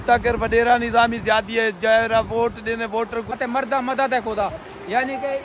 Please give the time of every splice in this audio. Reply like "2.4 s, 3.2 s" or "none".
3.4 s